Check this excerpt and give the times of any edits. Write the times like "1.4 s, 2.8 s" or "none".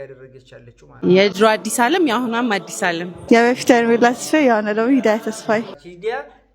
1.0 s, 5.7 s